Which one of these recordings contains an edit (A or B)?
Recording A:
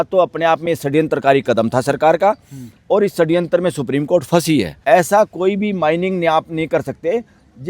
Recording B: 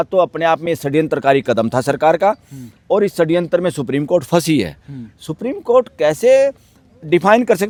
A